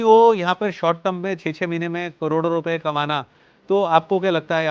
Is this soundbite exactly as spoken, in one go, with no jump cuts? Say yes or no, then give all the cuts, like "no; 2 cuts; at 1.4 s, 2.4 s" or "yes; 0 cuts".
yes; 0 cuts